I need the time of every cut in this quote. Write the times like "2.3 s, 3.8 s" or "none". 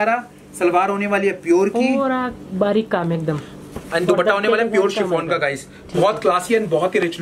none